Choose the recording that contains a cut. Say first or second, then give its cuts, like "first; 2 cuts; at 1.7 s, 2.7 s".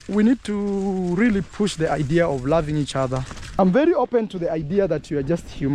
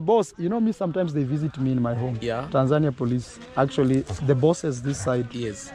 first; 1 cut; at 3.6 s